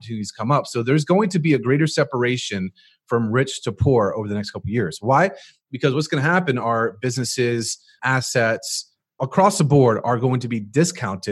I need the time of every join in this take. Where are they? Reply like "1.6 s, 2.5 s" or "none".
8.0 s, 9.2 s